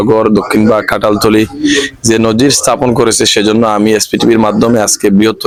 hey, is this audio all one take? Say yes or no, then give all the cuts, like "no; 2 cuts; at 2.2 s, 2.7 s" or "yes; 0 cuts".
yes; 0 cuts